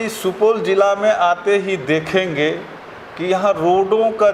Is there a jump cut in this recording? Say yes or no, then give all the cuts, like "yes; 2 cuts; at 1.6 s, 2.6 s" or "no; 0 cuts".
no; 0 cuts